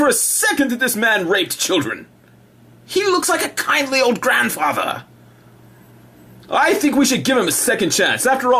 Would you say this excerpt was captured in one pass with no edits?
no; 1 cut; at 3.0 s

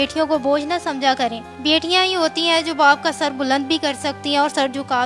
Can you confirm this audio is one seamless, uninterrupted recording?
yes; 0 cuts

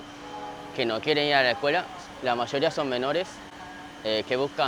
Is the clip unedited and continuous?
yes; 0 cuts

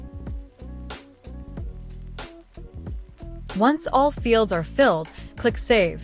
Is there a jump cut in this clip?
yes; 1 cut; at 3.1 s

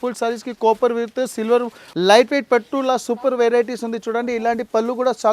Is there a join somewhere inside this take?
yes; 1 cut; at 1.8 s

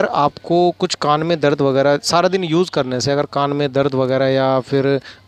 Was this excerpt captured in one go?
yes; 0 cuts

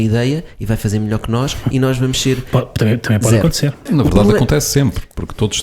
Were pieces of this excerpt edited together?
yes; 1 cut; at 3.9 s

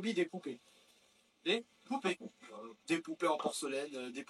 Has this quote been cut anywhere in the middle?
no; 0 cuts

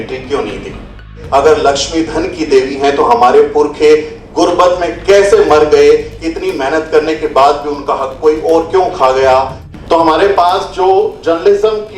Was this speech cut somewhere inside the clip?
yes; 2 cuts; at 1.2 s, 9.7 s

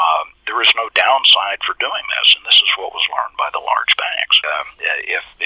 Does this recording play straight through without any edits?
no; 1 cut; at 4.4 s

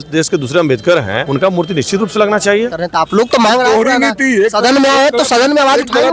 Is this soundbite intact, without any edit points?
no; 2 cuts; at 1.2 s, 2.7 s

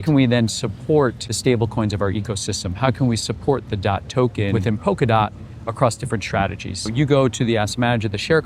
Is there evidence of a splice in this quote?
yes; 3 cuts; at 1.3 s, 4.6 s, 6.9 s

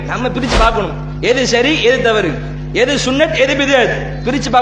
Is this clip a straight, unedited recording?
yes; 0 cuts

